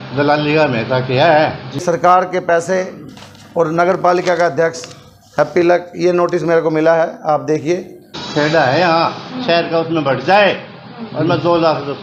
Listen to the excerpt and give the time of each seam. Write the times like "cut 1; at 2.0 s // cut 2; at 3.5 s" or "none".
cut 1; at 1.8 s // cut 2; at 8.2 s